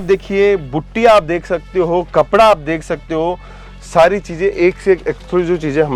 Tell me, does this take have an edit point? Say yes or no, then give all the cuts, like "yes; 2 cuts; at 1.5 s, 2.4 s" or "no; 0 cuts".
no; 0 cuts